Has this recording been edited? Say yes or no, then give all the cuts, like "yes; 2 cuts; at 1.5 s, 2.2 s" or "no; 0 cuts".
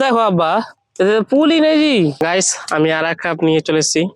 yes; 1 cut; at 2.2 s